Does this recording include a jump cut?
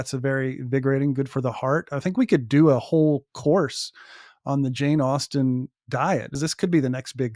yes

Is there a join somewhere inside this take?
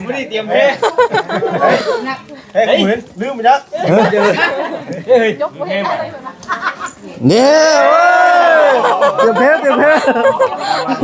no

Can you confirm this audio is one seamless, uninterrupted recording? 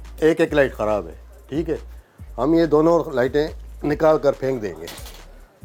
yes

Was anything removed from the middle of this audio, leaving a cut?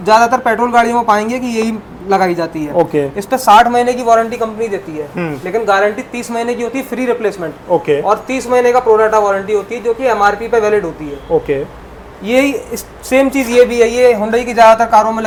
no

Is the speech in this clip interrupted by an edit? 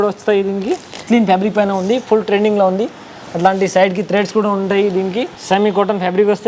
yes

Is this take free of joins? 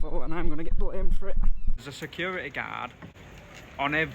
no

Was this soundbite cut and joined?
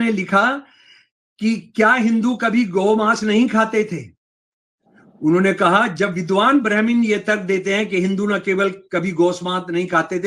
no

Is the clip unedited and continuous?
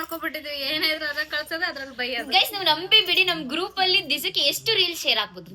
yes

